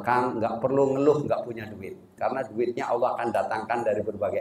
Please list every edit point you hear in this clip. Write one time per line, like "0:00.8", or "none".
0:02.2